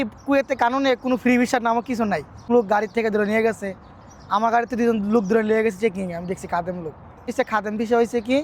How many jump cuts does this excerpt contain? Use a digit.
2